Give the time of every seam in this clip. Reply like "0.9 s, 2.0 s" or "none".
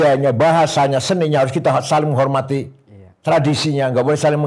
none